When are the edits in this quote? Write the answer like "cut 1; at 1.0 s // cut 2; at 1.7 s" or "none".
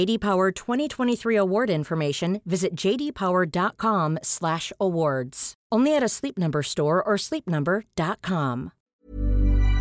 cut 1; at 8.9 s